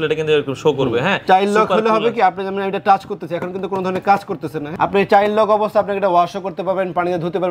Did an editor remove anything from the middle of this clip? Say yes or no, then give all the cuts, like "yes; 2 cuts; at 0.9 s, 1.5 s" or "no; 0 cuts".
yes; 2 cuts; at 1.2 s, 4.7 s